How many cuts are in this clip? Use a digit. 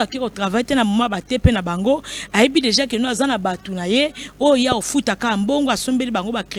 0